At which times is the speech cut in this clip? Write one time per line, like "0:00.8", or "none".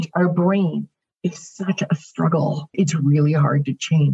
0:02.7